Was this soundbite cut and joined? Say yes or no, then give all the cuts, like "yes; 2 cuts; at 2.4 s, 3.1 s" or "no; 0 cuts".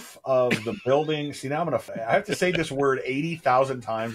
yes; 1 cut; at 1.9 s